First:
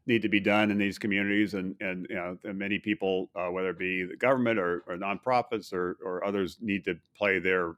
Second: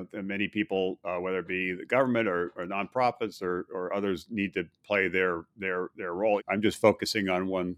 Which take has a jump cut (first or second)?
second